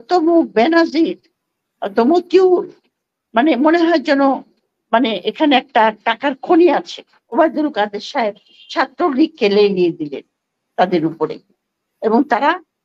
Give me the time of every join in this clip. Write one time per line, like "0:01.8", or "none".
0:07.4